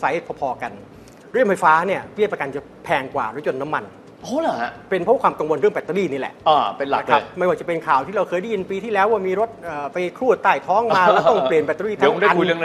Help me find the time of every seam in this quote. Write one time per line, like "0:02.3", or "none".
none